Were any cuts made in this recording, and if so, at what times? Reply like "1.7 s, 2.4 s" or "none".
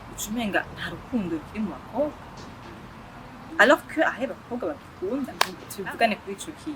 5.3 s